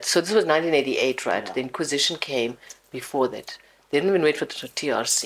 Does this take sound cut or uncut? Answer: uncut